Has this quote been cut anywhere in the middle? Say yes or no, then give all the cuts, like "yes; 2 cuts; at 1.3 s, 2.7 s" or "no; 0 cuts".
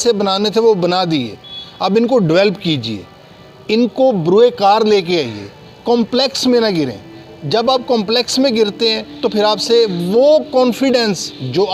no; 0 cuts